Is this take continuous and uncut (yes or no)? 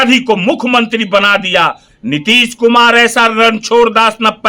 no